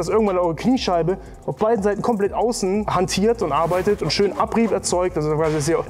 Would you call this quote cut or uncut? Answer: uncut